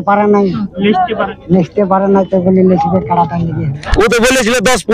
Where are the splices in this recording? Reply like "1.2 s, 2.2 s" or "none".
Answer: 3.8 s